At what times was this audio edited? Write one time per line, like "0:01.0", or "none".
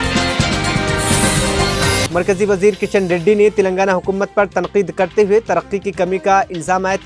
0:02.1